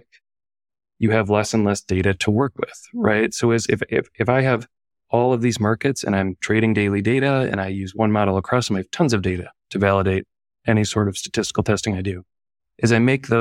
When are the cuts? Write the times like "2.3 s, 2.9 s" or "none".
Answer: none